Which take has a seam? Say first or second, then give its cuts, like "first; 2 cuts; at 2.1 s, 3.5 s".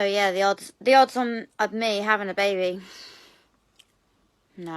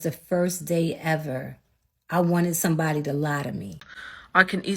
second; 1 cut; at 3.8 s